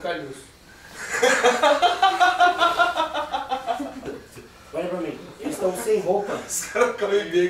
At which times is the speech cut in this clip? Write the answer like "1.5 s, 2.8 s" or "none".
none